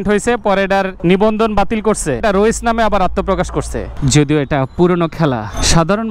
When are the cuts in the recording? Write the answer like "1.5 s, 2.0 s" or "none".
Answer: 0.9 s, 2.2 s, 4.0 s